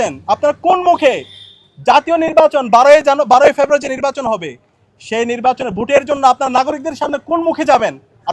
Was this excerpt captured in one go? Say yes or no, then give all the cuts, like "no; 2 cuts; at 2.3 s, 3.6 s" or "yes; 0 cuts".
yes; 0 cuts